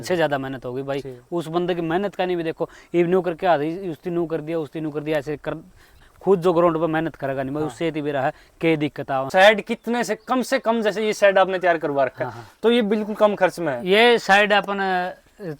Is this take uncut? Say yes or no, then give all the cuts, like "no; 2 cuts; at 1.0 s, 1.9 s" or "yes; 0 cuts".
no; 2 cuts; at 6.1 s, 9.3 s